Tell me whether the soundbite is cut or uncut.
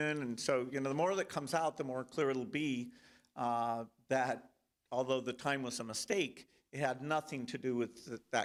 uncut